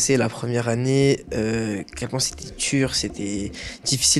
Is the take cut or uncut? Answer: uncut